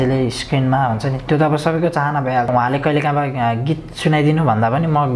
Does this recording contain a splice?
yes; 1 cut; at 2.5 s

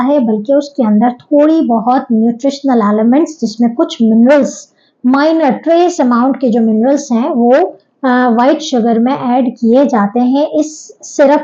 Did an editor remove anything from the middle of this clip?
no; 0 cuts

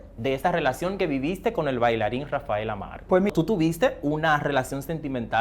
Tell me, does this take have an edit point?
yes; 1 cut; at 3.3 s

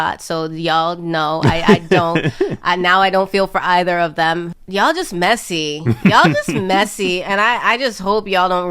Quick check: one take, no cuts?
no; 1 cut; at 4.6 s

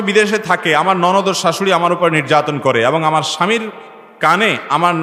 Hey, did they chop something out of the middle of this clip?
no; 0 cuts

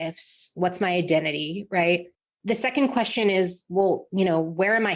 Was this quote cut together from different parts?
no; 0 cuts

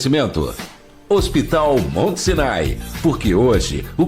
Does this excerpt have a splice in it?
yes; 1 cut; at 2.0 s

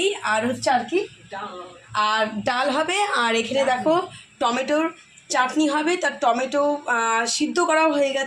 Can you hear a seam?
no; 0 cuts

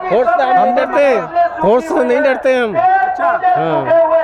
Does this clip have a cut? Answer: no; 0 cuts

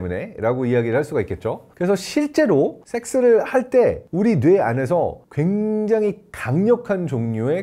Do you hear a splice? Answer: no; 0 cuts

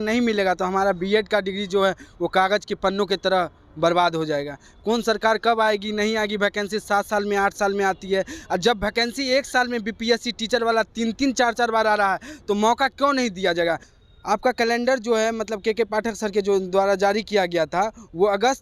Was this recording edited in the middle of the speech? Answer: yes; 1 cut; at 13.9 s

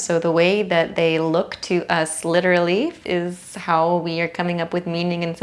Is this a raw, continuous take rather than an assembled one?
no; 1 cut; at 3.0 s

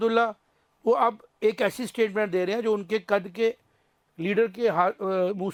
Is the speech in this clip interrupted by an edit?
no; 0 cuts

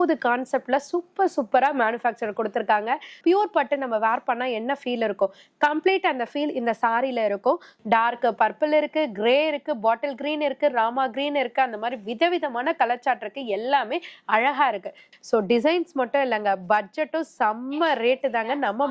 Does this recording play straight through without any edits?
no; 3 cuts; at 3.1 s, 7.7 s, 15.0 s

